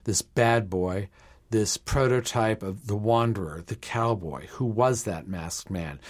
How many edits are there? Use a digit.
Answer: 0